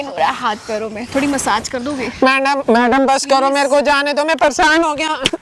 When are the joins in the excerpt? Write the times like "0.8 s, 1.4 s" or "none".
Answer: none